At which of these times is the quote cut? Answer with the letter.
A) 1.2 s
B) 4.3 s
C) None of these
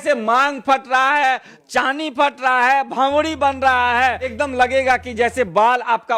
B